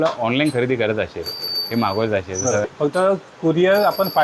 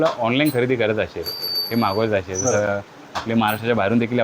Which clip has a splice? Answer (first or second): first